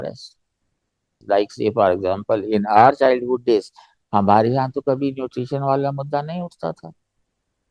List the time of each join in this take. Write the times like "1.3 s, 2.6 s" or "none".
1.2 s